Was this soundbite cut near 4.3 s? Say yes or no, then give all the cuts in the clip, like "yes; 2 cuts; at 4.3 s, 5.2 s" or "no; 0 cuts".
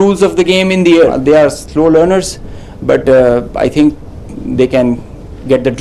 no; 1 cut; at 1.2 s